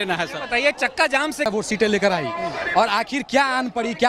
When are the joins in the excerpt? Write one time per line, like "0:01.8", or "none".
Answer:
0:01.5

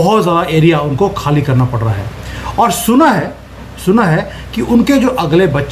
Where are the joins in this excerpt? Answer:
none

